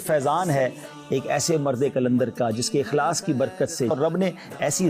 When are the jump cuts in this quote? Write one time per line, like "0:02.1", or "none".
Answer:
0:03.9